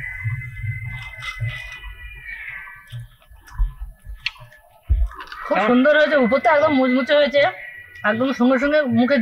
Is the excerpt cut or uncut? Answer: uncut